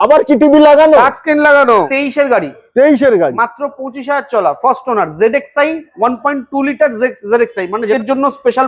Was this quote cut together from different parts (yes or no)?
yes